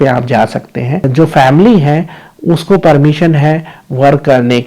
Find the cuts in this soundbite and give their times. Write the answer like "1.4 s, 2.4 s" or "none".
1.1 s